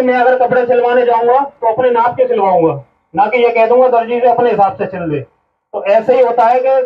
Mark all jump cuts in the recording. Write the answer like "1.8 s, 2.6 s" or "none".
none